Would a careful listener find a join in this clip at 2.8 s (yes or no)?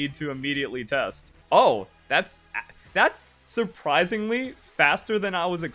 no